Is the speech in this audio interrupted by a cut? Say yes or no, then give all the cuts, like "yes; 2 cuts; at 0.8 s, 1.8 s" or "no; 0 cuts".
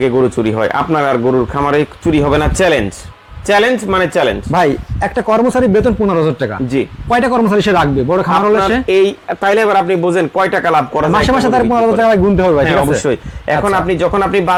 no; 0 cuts